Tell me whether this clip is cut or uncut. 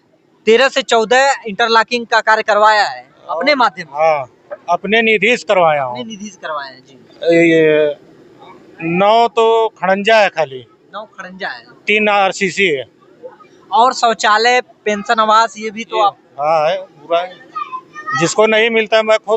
uncut